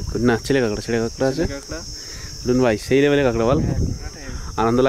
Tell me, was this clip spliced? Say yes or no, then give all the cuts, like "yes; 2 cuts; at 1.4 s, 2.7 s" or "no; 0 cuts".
no; 0 cuts